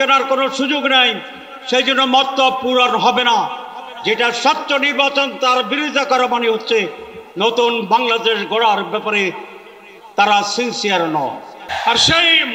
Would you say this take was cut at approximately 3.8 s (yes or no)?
no